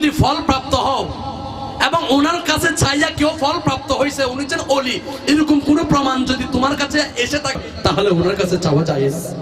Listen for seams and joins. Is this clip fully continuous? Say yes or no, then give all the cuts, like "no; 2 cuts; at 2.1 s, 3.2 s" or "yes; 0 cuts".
no; 1 cut; at 7.6 s